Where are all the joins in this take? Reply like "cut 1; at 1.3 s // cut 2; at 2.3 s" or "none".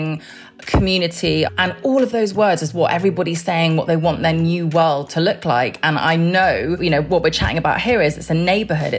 cut 1; at 1.5 s // cut 2; at 6.8 s

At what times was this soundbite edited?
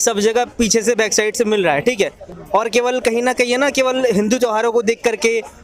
none

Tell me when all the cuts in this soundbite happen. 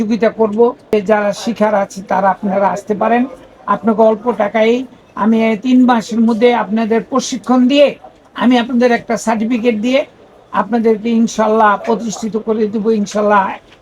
cut 1; at 0.9 s

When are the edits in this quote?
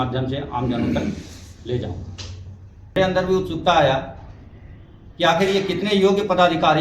cut 1; at 3.0 s

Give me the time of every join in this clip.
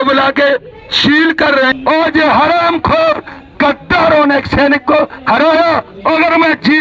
cut 1; at 1.7 s

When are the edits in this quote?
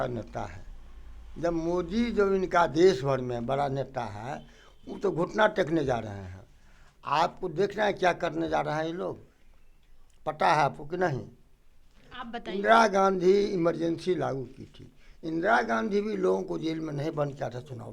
none

